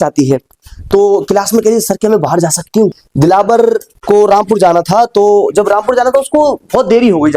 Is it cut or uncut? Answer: cut